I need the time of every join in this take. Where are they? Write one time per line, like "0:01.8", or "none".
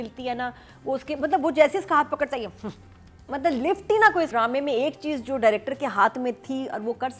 0:04.3

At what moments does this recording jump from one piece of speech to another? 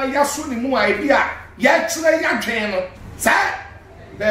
0:03.0

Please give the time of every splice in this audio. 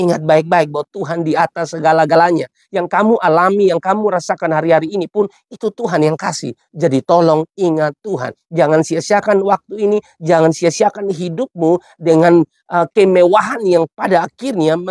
none

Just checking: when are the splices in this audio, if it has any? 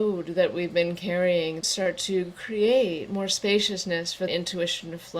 0:01.7
0:04.3

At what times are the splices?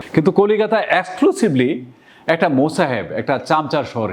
none

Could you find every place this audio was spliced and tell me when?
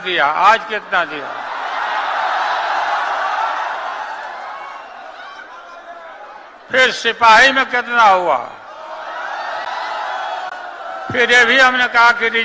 none

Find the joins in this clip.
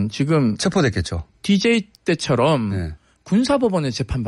0:01.8

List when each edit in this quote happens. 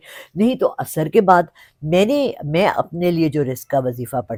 none

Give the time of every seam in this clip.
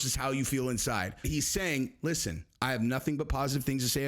0:01.2

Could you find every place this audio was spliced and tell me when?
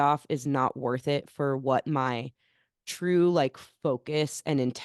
none

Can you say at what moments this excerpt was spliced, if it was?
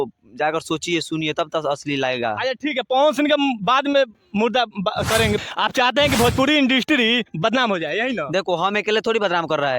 0:05.5

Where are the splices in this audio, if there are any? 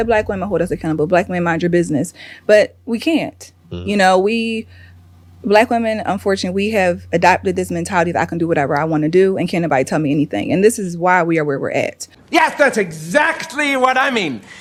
none

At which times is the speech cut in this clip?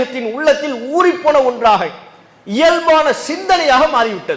none

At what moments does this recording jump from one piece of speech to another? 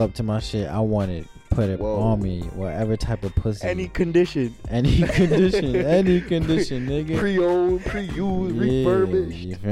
none

